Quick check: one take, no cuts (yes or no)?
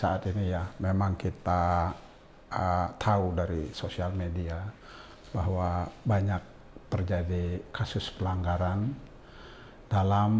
yes